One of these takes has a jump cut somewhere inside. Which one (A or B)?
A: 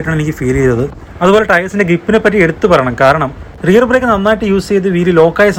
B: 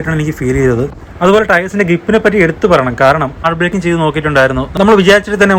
B